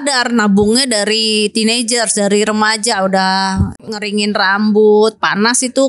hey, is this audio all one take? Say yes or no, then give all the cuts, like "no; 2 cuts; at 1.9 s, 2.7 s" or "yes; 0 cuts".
no; 1 cut; at 3.9 s